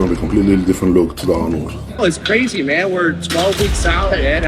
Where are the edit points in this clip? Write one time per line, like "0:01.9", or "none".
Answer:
0:02.0